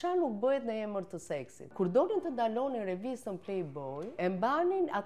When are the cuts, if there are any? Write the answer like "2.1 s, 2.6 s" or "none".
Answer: 1.6 s, 4.2 s